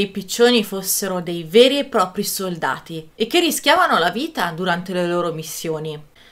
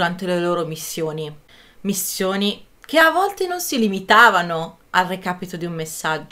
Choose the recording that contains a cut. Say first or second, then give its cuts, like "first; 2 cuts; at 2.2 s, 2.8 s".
first; 1 cut; at 3.0 s